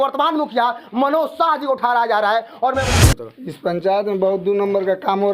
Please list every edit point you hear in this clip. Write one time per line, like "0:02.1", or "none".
0:02.9

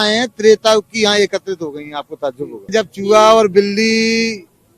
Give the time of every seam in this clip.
0:02.7

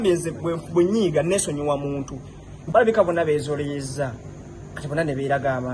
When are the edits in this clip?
0:02.5

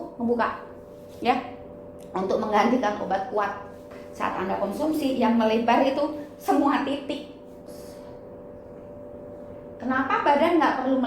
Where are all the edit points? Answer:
0:04.0
0:07.8

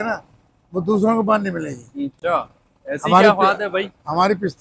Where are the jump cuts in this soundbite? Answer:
none

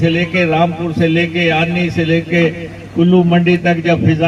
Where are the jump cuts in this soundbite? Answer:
none

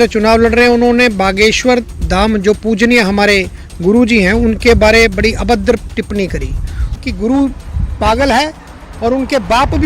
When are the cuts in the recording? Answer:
0:07.0

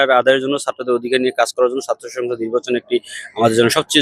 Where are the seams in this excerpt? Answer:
none

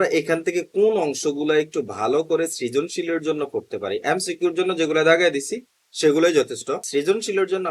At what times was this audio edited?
none

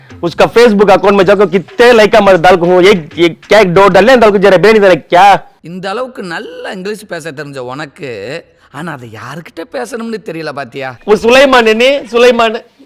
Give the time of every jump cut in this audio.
0:10.9

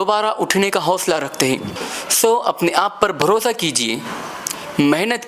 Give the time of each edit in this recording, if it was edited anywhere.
0:01.9

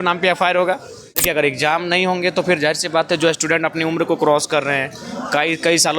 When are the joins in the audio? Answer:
0:01.1

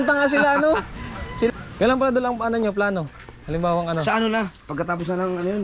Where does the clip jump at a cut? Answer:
0:01.5

